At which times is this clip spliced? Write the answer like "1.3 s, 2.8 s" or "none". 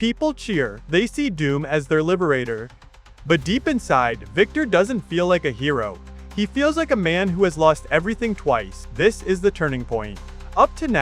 8.8 s